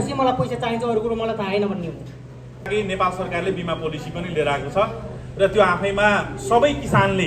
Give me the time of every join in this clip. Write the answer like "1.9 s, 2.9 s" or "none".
2.7 s